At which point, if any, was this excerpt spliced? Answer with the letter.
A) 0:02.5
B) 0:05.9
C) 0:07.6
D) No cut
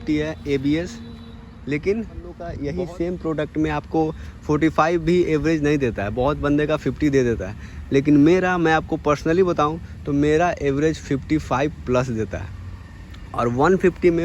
A